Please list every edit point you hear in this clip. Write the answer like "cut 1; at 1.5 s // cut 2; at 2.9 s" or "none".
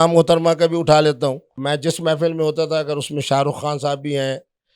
cut 1; at 1.5 s